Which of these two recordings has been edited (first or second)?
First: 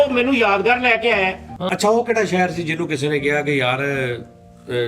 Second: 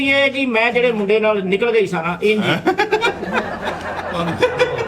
first